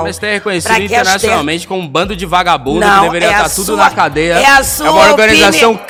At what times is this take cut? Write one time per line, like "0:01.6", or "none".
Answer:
none